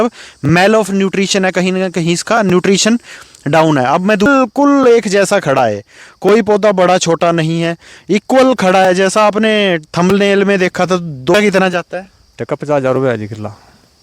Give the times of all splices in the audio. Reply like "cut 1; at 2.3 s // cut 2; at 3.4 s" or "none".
cut 1; at 4.3 s // cut 2; at 11.3 s